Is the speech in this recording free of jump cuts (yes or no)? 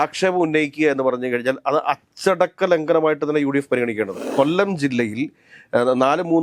no